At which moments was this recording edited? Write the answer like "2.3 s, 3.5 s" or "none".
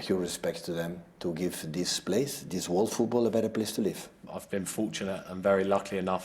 none